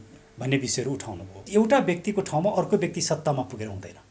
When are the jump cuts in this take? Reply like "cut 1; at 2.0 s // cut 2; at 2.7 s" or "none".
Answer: cut 1; at 1.4 s